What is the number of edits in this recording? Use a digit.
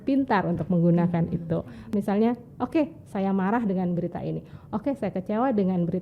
1